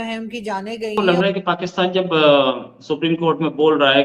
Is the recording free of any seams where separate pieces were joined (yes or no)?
no